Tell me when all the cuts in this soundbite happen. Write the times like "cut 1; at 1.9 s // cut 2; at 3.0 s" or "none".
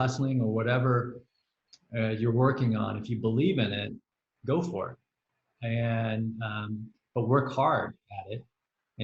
none